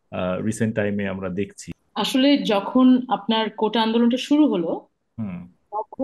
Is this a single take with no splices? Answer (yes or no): no